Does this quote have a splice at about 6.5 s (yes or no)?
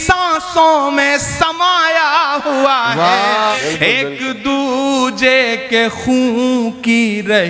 no